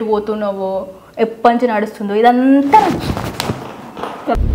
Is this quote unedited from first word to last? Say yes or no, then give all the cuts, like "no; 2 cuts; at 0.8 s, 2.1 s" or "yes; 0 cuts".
yes; 0 cuts